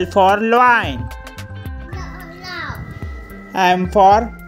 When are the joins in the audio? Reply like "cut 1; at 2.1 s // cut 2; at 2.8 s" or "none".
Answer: none